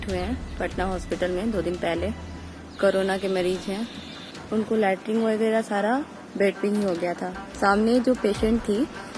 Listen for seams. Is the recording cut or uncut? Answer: cut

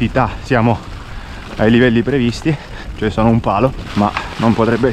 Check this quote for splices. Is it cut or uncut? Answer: uncut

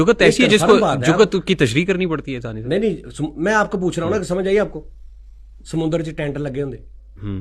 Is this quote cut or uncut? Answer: uncut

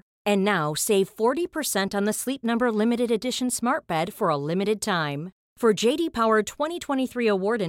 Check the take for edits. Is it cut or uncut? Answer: uncut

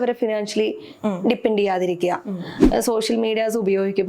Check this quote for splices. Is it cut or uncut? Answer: cut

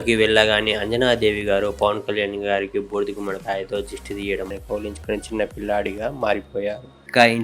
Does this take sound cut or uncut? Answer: cut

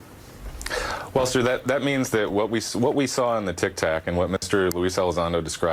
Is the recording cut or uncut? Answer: uncut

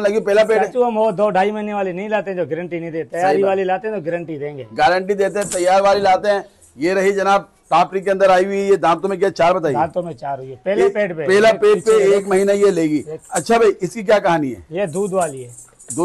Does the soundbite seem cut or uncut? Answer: uncut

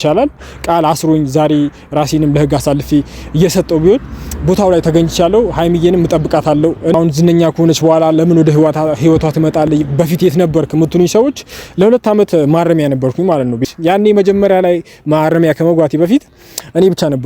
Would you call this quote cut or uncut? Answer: cut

